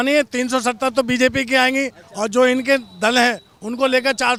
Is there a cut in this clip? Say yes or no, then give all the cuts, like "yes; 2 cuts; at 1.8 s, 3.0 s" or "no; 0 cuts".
no; 0 cuts